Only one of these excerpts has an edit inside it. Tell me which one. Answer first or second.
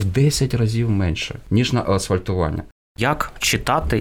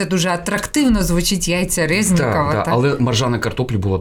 first